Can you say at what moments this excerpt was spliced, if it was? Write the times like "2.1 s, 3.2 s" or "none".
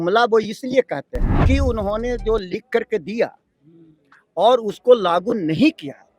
1.4 s